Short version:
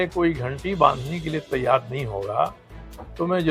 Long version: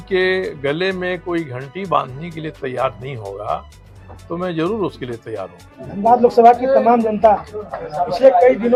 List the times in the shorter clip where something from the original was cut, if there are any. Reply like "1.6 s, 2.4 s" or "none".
none